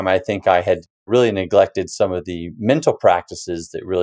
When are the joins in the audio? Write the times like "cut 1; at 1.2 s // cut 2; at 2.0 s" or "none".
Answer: cut 1; at 1.1 s